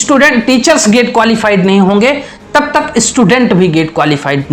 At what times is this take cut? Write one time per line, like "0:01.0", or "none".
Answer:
none